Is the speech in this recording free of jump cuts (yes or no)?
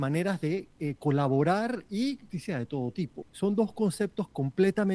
no